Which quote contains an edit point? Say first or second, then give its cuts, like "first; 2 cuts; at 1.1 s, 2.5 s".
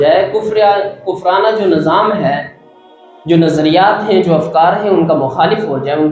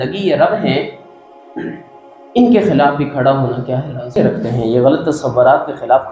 second; 1 cut; at 4.2 s